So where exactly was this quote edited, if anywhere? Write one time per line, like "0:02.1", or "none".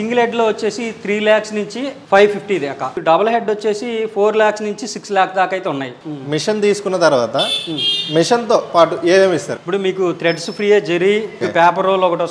0:03.0
0:06.0
0:09.5
0:11.4

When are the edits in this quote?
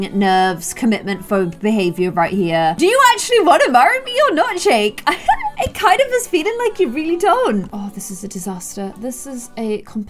0:02.7
0:07.6

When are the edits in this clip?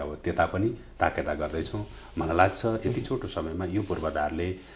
none

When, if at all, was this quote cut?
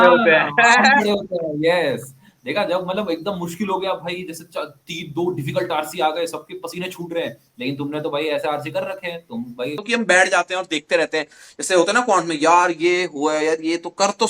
0:09.8

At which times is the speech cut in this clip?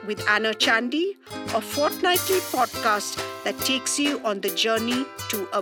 none

